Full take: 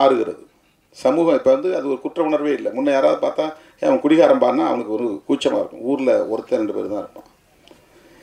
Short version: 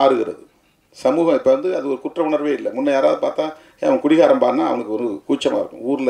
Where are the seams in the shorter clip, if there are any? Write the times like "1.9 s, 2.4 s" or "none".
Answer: none